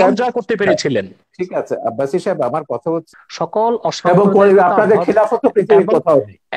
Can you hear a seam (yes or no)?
yes